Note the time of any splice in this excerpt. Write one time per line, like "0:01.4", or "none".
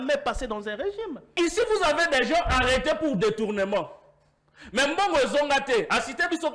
0:01.3